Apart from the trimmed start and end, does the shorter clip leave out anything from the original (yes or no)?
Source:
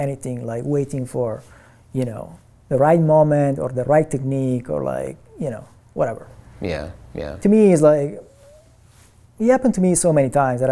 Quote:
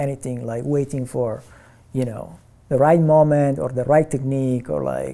no